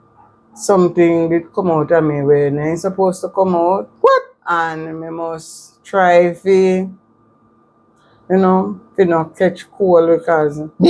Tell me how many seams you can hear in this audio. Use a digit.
0